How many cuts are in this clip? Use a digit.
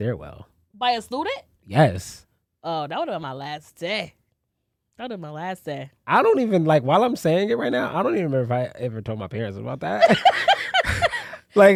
0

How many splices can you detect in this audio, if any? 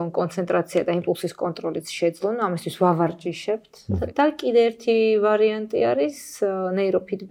1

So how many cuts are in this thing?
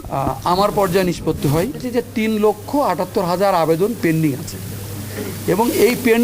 1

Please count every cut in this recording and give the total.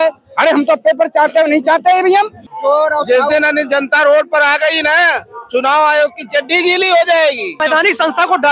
2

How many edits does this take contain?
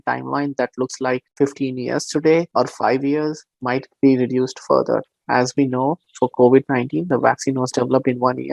3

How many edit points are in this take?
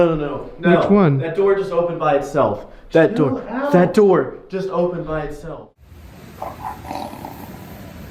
1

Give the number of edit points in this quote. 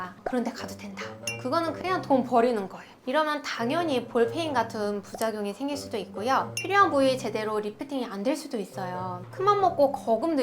2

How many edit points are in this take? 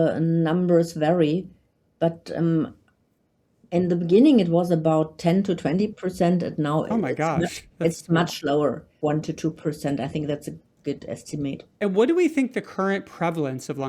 2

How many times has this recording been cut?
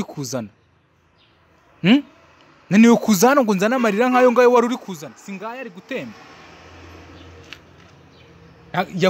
0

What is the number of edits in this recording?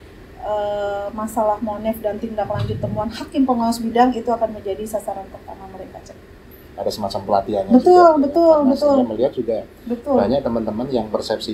0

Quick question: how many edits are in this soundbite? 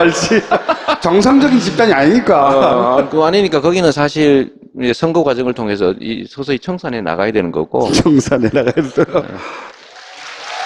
1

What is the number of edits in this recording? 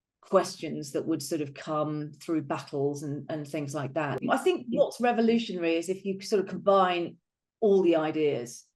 1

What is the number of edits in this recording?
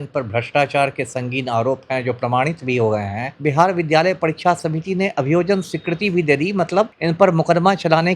2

